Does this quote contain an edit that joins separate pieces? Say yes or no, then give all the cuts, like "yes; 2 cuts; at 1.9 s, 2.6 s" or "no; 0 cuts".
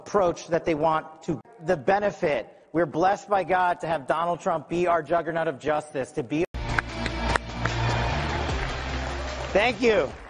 no; 0 cuts